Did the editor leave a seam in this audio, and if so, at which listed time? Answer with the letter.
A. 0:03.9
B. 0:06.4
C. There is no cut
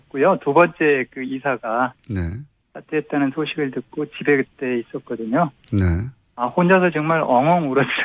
C